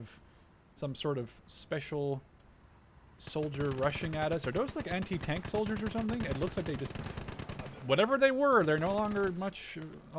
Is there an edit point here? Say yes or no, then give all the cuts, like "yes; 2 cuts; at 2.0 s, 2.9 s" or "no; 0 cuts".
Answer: no; 0 cuts